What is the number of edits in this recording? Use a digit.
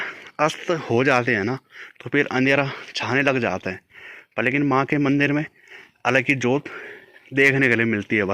0